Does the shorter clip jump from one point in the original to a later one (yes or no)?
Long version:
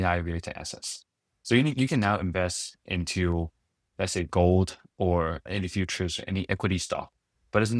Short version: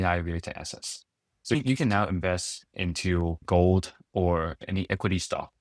yes